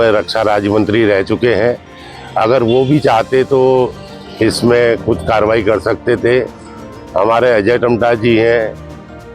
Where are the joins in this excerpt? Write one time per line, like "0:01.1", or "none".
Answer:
none